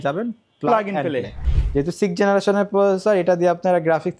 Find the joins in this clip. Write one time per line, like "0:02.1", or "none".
0:01.5